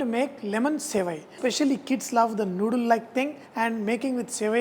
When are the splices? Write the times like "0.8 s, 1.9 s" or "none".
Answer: 1.3 s, 3.4 s